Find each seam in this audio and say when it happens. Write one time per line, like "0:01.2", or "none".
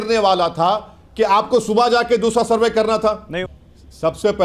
0:03.3